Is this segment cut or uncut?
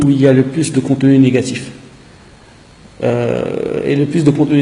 uncut